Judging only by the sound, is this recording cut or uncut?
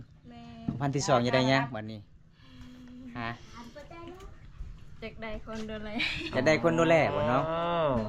uncut